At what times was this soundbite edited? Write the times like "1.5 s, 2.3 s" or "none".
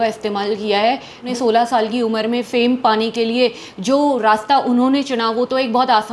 1.3 s

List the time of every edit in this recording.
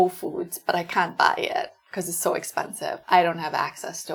none

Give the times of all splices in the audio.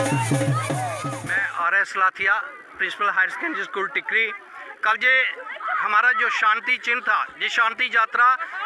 1.2 s

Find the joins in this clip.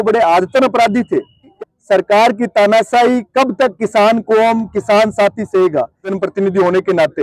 1.5 s, 6.1 s

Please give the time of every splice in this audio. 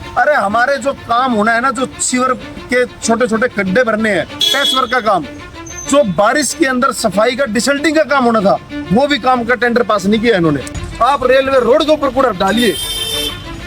10.8 s

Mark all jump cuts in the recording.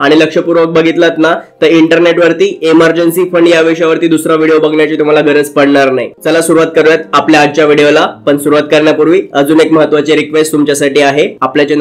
none

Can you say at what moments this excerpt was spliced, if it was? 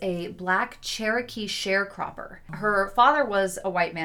2.5 s

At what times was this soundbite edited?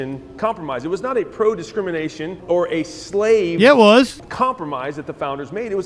2.4 s, 4.2 s

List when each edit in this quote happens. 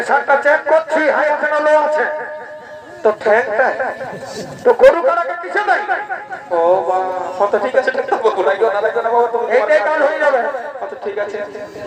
none

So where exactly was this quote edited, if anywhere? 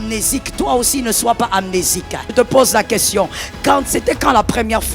2.3 s

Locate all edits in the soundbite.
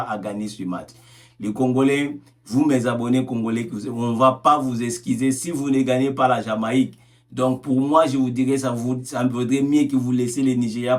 none

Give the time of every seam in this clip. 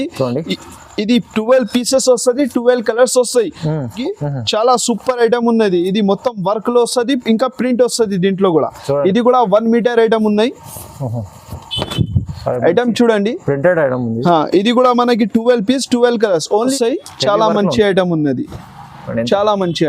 4.0 s, 16.7 s

